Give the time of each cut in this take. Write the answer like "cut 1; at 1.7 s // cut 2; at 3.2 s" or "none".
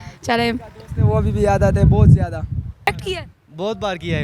cut 1; at 2.9 s